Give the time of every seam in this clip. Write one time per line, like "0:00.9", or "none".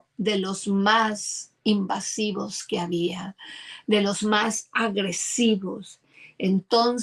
none